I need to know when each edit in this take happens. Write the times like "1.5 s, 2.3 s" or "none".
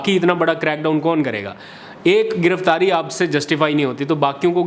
none